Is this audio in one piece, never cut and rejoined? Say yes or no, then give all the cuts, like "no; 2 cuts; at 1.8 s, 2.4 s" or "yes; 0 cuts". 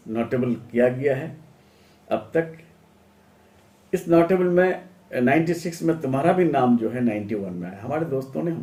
yes; 0 cuts